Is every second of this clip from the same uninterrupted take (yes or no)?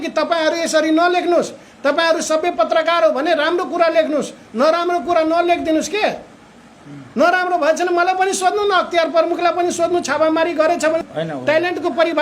no